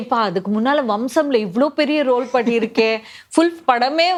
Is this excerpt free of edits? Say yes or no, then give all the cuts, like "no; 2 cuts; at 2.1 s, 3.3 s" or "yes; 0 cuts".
yes; 0 cuts